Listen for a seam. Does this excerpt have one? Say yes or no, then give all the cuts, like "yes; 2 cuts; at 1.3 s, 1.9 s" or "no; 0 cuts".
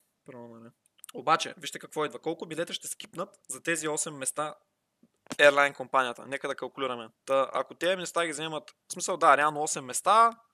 yes; 2 cuts; at 1.1 s, 5.1 s